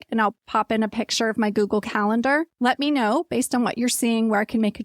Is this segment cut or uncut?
cut